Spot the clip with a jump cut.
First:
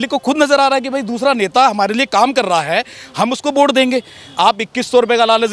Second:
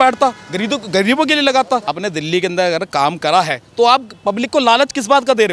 second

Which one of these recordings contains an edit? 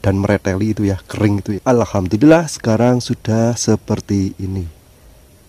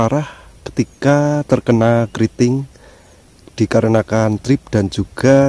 first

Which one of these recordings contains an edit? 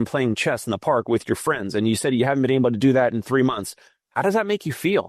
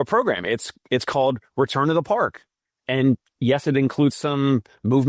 second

